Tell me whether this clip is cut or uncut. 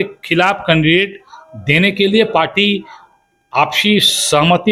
uncut